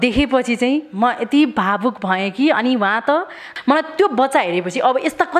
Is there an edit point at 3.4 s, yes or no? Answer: yes